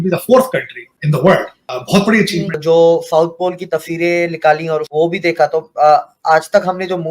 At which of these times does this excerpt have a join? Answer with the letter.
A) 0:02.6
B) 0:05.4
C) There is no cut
A